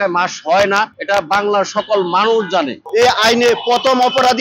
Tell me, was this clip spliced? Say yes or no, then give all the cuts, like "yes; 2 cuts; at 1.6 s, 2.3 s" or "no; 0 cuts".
yes; 2 cuts; at 1.0 s, 2.8 s